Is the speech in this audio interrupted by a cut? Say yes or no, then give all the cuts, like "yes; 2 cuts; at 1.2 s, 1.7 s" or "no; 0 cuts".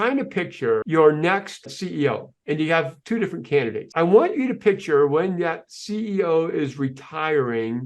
yes; 3 cuts; at 0.8 s, 1.8 s, 3.8 s